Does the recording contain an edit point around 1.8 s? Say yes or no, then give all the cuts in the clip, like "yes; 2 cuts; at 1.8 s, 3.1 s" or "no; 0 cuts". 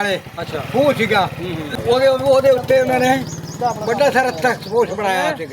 yes; 1 cut; at 1.8 s